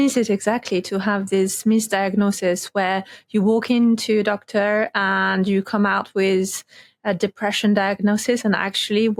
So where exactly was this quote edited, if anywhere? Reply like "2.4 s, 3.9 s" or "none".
none